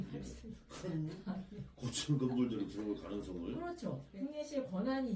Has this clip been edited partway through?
yes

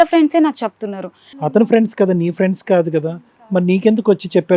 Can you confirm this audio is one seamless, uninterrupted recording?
no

